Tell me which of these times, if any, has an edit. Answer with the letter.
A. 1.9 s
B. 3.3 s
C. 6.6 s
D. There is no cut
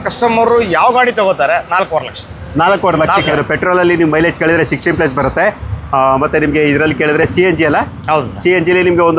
B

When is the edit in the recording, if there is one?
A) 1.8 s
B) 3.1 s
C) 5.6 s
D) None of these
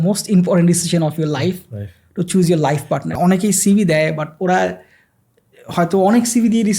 B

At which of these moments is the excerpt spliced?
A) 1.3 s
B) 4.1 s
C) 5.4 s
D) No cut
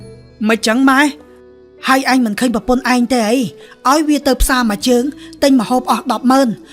A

